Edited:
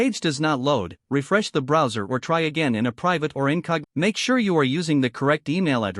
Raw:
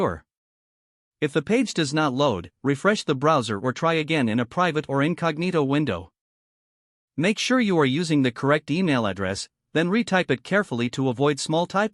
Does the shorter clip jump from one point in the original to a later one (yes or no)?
yes